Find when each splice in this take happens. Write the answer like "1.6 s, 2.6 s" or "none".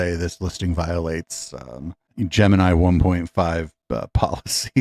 none